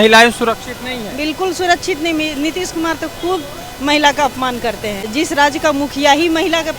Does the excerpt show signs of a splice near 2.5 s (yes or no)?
no